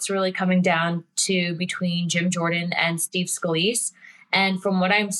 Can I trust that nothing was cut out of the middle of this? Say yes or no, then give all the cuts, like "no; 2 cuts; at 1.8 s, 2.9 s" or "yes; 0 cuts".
yes; 0 cuts